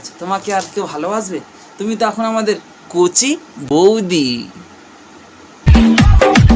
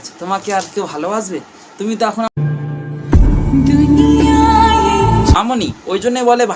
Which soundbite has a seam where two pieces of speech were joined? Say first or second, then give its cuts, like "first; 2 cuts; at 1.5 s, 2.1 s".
second; 2 cuts; at 2.3 s, 5.3 s